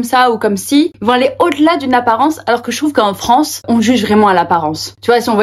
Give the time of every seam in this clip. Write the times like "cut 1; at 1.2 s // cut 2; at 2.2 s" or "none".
cut 1; at 0.9 s // cut 2; at 3.6 s